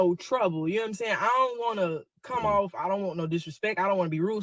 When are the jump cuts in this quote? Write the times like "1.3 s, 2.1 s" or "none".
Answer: none